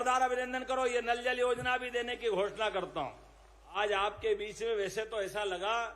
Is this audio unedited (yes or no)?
no